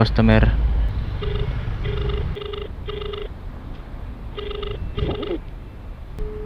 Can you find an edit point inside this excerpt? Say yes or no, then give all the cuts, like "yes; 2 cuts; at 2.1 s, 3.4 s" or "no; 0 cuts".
yes; 2 cuts; at 0.9 s, 2.3 s